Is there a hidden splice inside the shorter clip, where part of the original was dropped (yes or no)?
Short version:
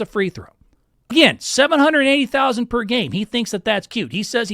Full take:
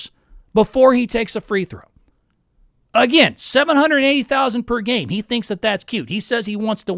yes